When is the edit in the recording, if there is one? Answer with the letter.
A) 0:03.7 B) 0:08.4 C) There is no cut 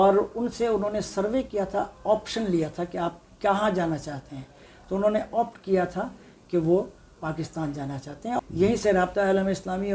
B